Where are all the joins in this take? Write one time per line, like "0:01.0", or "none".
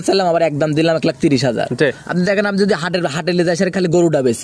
none

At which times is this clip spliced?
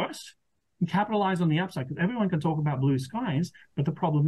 none

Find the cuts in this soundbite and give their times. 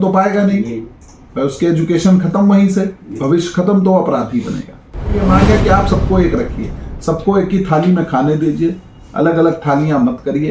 0:05.1

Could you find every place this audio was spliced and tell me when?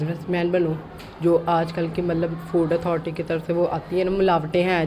none

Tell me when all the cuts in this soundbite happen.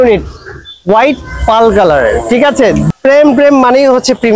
0:02.9

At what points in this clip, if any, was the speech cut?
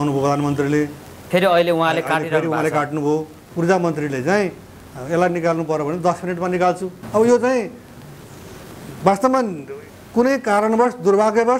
0:03.4
0:06.9

